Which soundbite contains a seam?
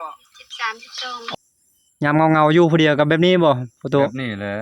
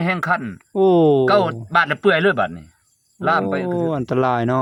first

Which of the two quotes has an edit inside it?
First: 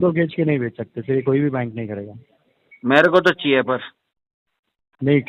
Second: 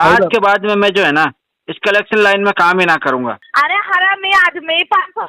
second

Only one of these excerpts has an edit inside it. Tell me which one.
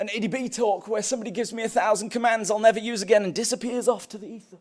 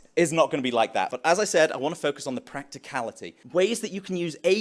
second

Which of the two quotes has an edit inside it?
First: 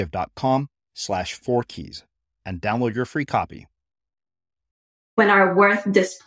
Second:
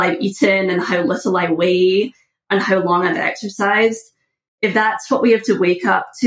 first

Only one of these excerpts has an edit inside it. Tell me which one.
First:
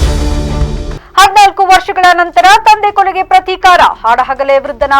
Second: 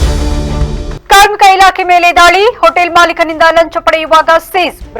second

